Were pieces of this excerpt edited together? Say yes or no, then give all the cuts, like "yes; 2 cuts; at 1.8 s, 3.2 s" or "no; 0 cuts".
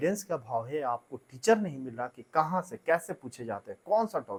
no; 0 cuts